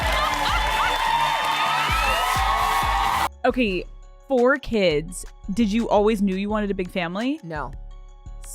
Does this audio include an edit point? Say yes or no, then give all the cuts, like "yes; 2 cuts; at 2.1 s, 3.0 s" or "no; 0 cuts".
yes; 1 cut; at 3.3 s